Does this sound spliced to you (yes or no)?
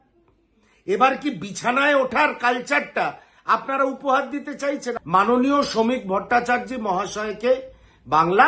yes